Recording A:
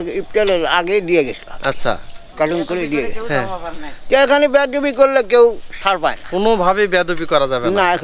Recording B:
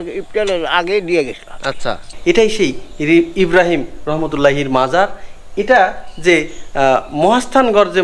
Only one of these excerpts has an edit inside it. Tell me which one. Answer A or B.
B